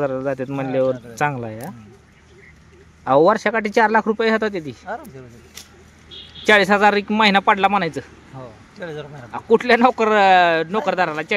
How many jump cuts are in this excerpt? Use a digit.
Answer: 0